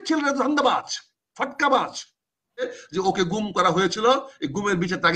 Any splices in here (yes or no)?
yes